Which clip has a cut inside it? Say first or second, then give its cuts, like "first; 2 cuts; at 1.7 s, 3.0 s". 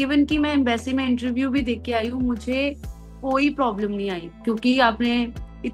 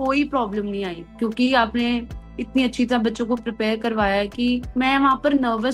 second; 1 cut; at 4.7 s